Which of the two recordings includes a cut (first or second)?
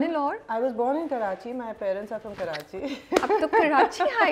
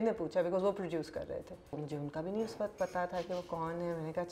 second